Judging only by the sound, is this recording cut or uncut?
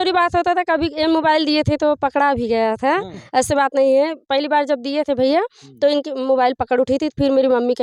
uncut